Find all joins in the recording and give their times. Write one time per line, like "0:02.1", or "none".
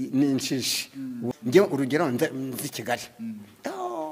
0:01.2

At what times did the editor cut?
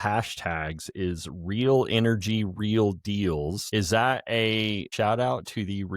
0:03.6
0:04.9

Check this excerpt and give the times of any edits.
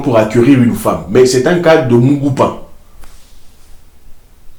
none

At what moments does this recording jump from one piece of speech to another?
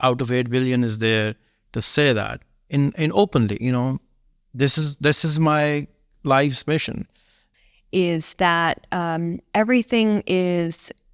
0:07.4

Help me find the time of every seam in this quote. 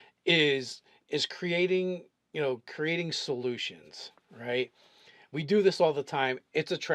0:04.5

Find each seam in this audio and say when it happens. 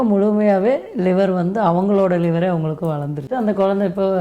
0:03.3

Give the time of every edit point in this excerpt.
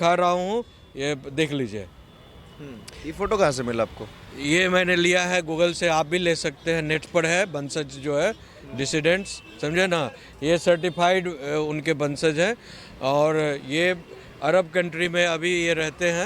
none

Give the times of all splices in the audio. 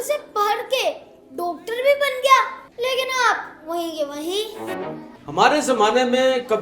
0:02.6
0:05.1

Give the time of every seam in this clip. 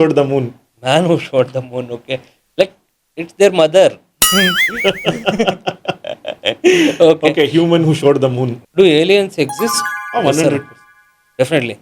0:08.5

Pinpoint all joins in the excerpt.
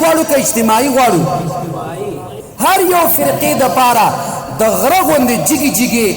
0:02.3

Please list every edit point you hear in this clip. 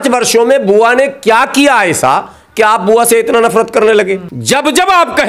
0:04.3

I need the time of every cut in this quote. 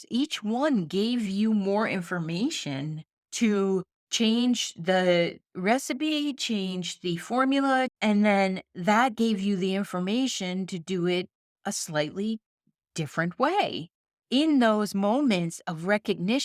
0:07.9

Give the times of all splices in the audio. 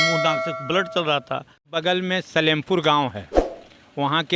0:01.7

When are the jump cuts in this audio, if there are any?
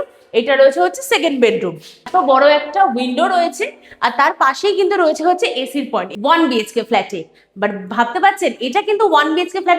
0:02.1
0:06.1

